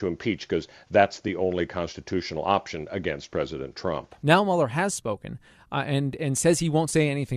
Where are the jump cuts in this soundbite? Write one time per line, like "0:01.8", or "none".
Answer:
0:04.1